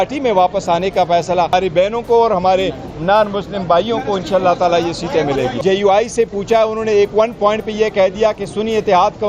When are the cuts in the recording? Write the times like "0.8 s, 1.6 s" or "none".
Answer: 1.5 s, 5.6 s